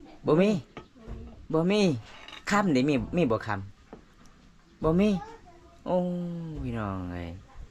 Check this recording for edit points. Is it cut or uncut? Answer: uncut